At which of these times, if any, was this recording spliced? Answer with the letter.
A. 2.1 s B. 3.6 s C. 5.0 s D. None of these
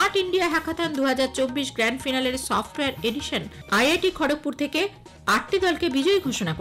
B